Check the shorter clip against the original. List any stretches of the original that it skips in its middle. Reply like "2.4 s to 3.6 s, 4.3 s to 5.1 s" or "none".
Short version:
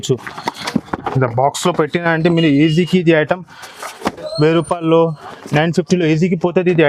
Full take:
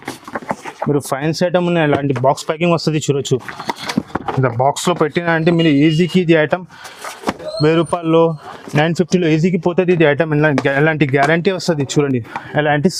none